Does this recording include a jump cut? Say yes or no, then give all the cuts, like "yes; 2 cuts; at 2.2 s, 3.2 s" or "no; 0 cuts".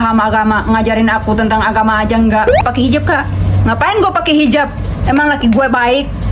yes; 1 cut; at 2.6 s